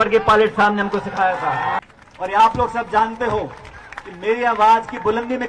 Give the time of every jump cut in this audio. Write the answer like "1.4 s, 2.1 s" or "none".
1.8 s